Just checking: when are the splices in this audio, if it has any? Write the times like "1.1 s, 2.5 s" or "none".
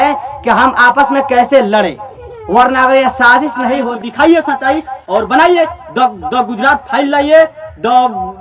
3.8 s